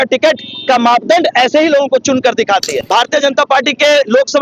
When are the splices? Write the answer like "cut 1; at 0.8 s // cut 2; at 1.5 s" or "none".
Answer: cut 1; at 2.8 s